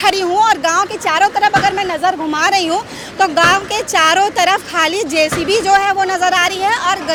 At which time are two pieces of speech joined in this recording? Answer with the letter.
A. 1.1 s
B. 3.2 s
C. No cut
C